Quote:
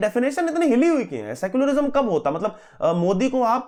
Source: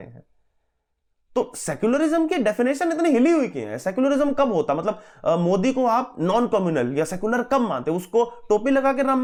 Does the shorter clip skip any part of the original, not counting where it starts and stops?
no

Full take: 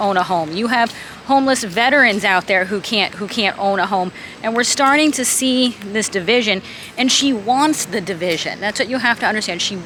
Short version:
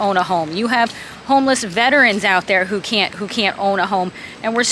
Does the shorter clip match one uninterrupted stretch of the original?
yes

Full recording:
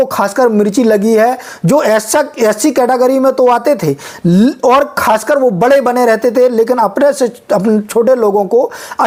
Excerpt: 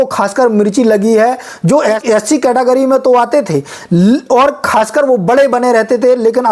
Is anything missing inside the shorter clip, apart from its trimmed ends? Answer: yes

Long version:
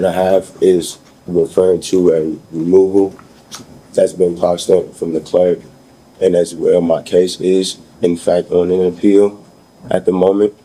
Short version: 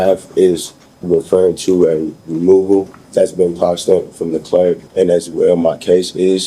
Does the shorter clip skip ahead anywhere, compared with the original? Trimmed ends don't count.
yes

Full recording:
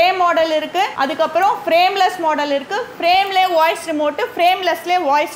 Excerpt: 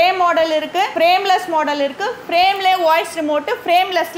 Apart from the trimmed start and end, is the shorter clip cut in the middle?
yes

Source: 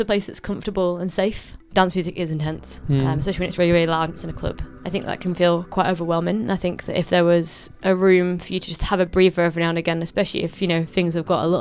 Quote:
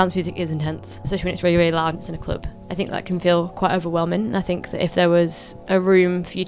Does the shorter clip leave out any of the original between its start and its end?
yes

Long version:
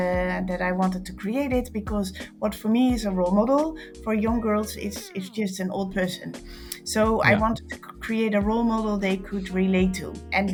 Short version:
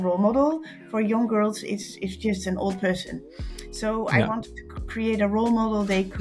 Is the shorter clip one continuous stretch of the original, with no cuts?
yes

